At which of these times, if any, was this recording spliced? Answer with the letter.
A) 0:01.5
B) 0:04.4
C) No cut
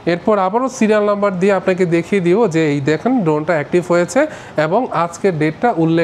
C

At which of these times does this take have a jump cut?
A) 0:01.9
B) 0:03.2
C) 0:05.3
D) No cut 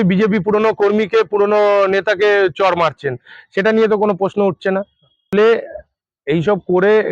C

